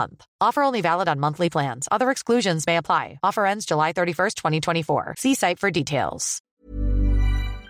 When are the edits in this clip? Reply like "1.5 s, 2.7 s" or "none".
6.5 s

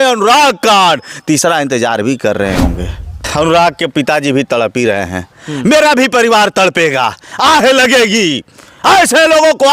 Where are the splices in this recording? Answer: 3.2 s

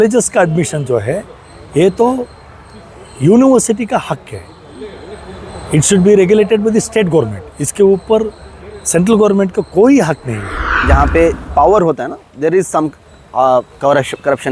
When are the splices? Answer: 10.8 s

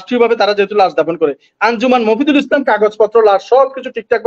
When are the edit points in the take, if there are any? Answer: none

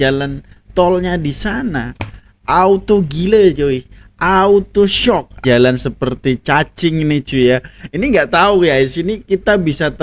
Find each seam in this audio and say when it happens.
5.4 s

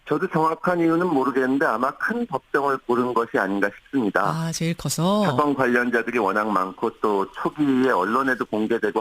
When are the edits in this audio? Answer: 7.5 s

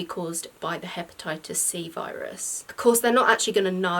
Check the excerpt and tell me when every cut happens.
2.6 s

